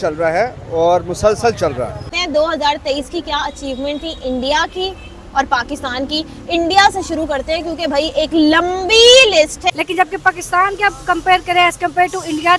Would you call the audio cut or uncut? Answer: cut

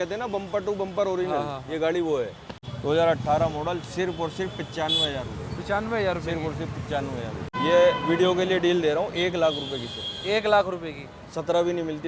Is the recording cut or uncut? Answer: cut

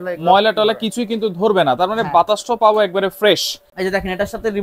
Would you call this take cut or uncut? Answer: cut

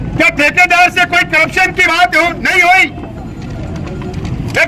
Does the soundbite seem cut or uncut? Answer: uncut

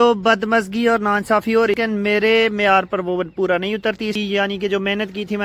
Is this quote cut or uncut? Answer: cut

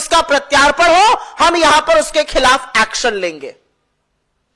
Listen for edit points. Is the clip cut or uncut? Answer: uncut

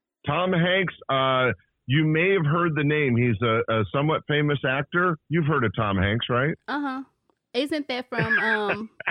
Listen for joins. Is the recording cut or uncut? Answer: uncut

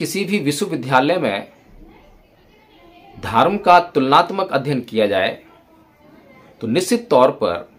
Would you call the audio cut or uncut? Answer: uncut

